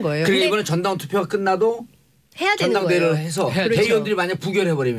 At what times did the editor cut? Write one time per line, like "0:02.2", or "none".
0:03.9